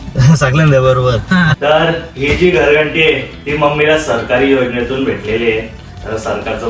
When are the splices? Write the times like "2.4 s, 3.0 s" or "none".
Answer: 1.5 s